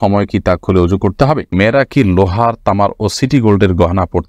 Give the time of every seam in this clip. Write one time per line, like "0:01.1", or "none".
0:01.5